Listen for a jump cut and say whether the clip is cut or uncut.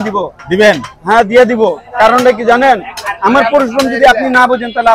uncut